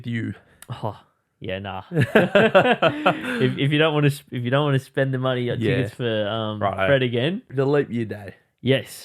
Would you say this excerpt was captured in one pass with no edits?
no; 1 cut; at 7.5 s

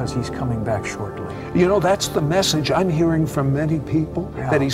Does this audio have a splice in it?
no; 0 cuts

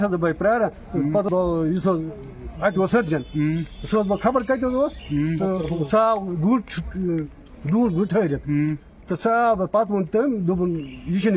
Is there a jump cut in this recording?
yes; 1 cut; at 1.3 s

